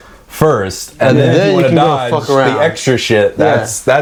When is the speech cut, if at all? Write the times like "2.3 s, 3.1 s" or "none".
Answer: none